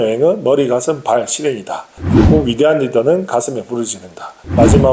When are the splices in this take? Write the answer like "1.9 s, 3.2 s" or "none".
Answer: none